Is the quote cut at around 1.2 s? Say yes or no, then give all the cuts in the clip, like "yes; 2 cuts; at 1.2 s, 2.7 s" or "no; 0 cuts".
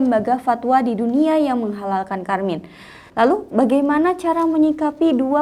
no; 1 cut; at 3.0 s